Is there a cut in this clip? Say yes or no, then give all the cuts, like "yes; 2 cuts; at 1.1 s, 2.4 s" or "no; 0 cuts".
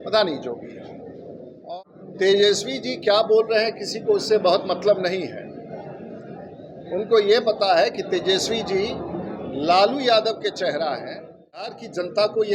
yes; 2 cuts; at 1.6 s, 11.7 s